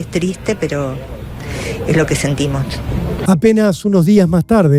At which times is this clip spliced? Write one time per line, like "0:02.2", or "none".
none